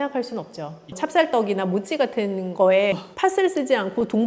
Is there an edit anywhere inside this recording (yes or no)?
yes